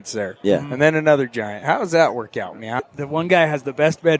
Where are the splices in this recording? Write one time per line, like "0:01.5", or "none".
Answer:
0:03.0